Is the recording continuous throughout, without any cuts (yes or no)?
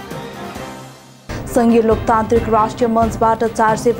no